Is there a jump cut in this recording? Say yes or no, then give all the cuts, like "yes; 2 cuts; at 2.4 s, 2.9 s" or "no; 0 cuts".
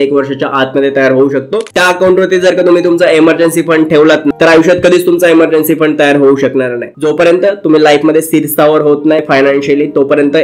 yes; 4 cuts; at 1.7 s, 4.3 s, 6.9 s, 9.2 s